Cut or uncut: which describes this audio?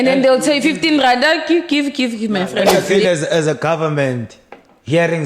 cut